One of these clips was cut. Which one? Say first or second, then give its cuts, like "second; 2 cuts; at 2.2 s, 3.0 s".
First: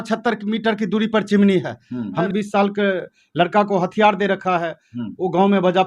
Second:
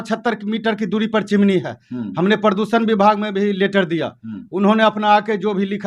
first; 1 cut; at 2.2 s